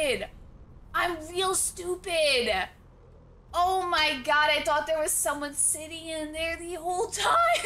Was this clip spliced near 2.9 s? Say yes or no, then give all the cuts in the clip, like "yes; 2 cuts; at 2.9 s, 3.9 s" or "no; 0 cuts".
no; 0 cuts